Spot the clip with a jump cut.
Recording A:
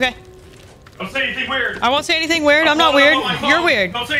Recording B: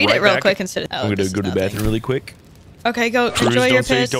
B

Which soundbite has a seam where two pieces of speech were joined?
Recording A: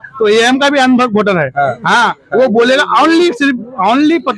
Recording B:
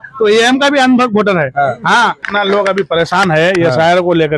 B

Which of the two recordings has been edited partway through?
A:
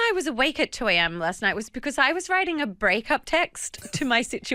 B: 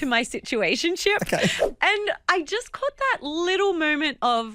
B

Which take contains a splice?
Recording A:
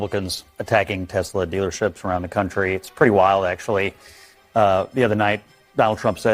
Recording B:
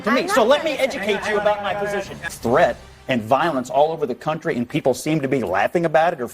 B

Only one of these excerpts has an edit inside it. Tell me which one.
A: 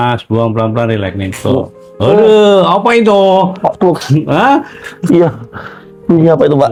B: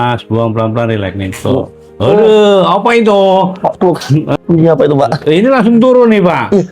B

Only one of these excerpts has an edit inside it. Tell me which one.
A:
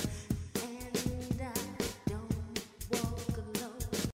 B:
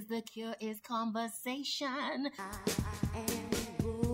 B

